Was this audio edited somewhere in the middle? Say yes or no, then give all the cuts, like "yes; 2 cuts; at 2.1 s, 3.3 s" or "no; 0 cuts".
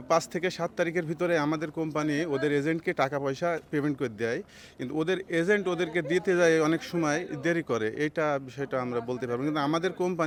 no; 0 cuts